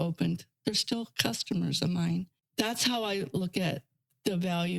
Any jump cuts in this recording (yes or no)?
yes